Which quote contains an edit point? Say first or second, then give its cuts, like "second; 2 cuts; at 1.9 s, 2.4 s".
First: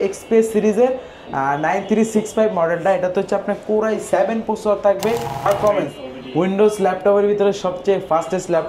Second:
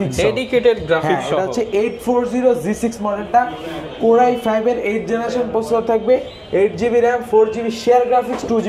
first; 1 cut; at 5.5 s